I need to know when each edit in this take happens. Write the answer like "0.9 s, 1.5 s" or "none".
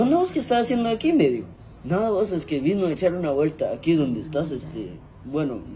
1.5 s

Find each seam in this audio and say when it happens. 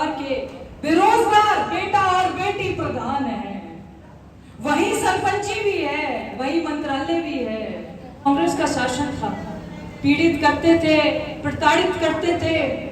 8.3 s

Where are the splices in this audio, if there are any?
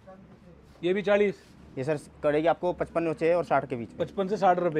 none

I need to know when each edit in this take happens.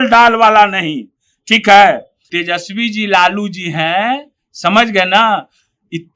2.3 s

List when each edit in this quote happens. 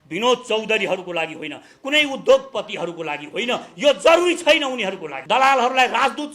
5.1 s

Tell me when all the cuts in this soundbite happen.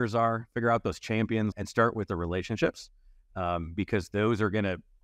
1.5 s

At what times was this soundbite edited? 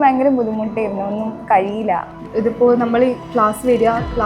2.2 s

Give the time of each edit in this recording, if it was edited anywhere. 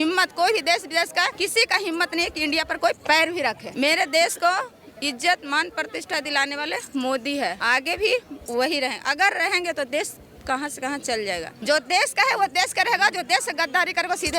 1.3 s, 3.6 s, 7.6 s, 11.5 s

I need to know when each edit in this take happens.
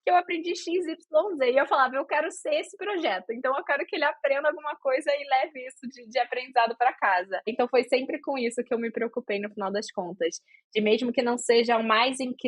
7.5 s

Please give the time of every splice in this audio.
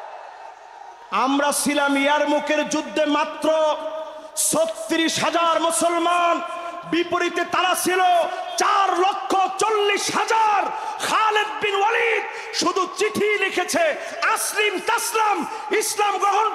1.0 s

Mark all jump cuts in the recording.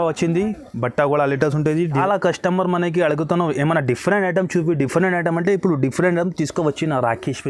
2.0 s

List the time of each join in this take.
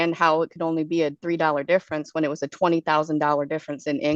none

